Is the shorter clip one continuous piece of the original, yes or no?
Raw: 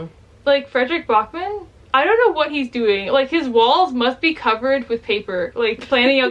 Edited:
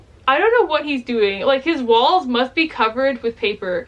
yes